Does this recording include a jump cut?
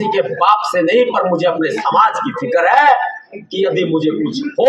no; 0 cuts

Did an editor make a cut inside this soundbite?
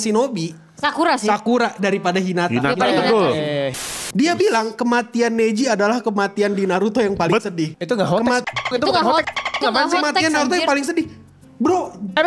yes; 2 cuts; at 3.7 s, 7.8 s

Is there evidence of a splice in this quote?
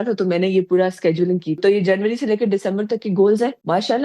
yes; 1 cut; at 1.6 s

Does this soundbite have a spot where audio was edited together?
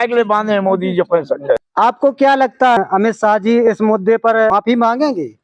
yes; 3 cuts; at 1.7 s, 2.8 s, 4.5 s

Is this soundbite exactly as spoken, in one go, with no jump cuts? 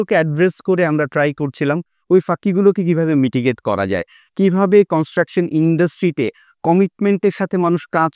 yes; 0 cuts

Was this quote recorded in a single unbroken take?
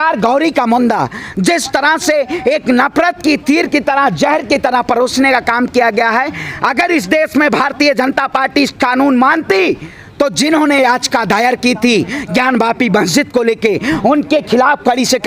yes; 0 cuts

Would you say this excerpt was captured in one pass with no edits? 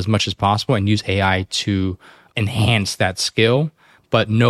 no; 1 cut; at 2.2 s

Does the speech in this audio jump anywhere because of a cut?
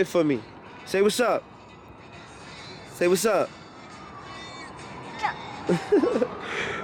no; 0 cuts

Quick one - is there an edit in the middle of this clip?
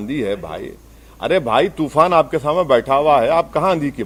no; 0 cuts

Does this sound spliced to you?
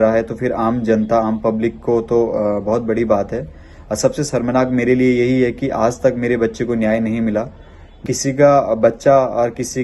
yes; 1 cut; at 8.0 s

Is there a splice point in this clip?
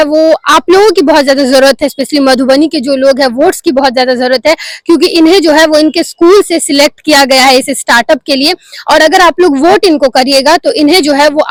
no; 0 cuts

